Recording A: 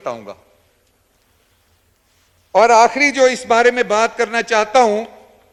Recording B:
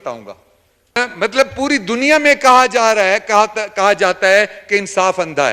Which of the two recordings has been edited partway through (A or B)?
B